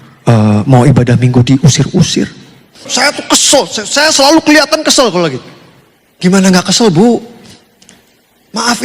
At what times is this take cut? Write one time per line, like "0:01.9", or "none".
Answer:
0:02.9